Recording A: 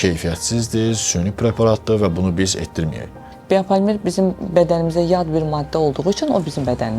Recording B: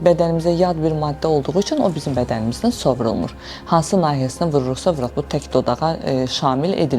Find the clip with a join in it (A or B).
A